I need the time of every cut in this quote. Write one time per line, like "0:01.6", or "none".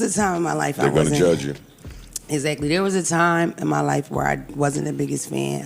none